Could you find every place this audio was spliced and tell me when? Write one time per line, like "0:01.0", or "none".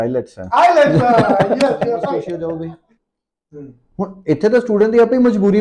0:02.3